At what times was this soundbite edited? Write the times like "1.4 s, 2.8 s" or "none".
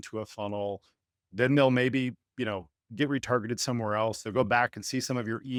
none